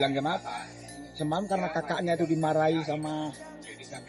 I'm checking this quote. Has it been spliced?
no; 0 cuts

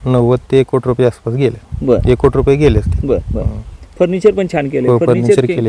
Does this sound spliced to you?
no; 0 cuts

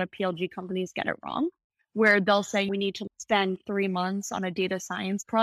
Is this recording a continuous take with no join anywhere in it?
no; 1 cut; at 2.7 s

